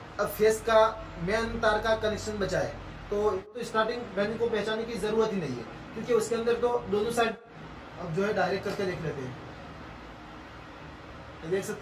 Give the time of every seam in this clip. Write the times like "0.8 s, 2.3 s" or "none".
3.5 s, 7.4 s